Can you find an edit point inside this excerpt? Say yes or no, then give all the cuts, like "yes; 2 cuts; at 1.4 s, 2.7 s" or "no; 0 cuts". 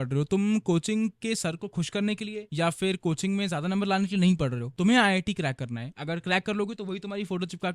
yes; 1 cut; at 4.7 s